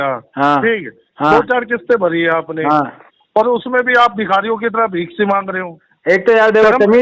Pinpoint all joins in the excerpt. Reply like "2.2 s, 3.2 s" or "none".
none

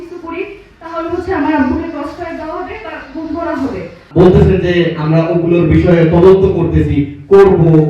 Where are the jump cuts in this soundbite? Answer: 4.0 s

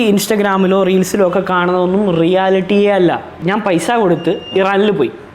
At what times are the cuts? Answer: 3.3 s

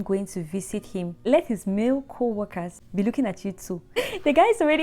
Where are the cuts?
1.2 s, 2.8 s, 4.0 s

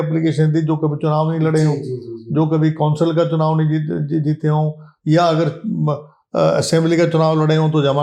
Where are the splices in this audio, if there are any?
none

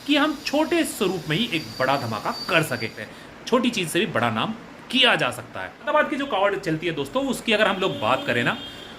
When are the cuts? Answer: 3.0 s, 5.9 s

